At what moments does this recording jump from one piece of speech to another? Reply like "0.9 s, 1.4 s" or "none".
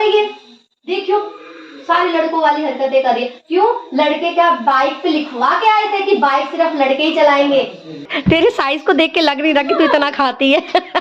8.1 s